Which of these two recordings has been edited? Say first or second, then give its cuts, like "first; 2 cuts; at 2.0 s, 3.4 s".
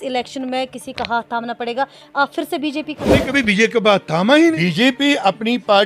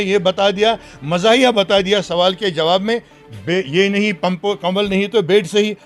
first; 2 cuts; at 3.1 s, 4.5 s